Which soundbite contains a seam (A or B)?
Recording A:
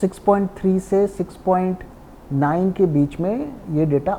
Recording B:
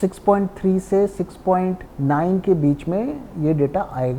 B